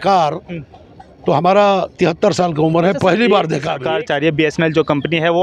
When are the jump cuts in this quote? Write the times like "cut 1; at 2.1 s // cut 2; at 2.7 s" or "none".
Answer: cut 1; at 3.8 s

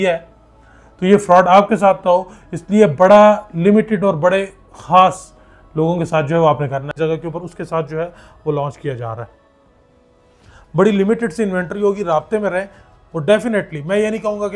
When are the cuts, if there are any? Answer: cut 1; at 6.9 s

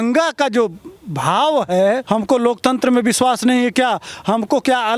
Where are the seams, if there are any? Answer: cut 1; at 2.0 s

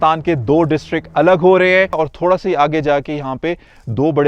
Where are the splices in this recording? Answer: cut 1; at 1.9 s

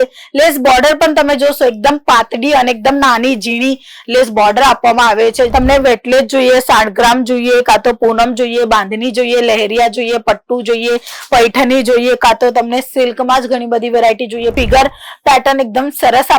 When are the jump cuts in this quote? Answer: cut 1; at 5.5 s // cut 2; at 14.5 s

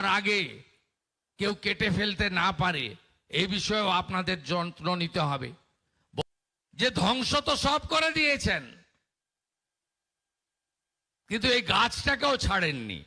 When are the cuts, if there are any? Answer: cut 1; at 6.2 s

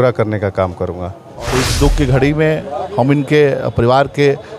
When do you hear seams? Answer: cut 1; at 1.5 s

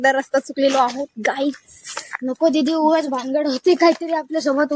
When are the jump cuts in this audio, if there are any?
none

